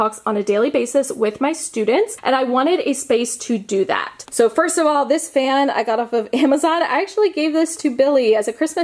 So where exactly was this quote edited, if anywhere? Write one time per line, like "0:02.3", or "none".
none